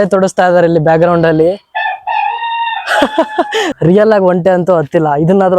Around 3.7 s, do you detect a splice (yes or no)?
yes